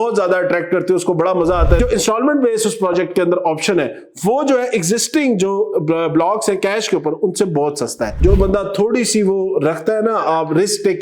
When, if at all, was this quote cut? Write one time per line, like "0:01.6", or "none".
0:01.8
0:08.1